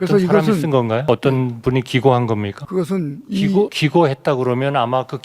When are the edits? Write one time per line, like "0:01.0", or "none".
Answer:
0:01.0
0:02.6
0:03.7